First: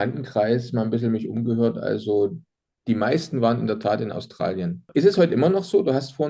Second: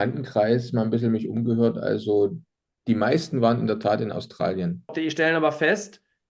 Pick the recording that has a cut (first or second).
second